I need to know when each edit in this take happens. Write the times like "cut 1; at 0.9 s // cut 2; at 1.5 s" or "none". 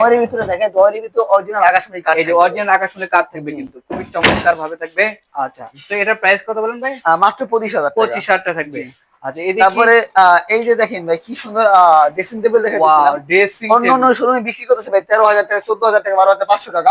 none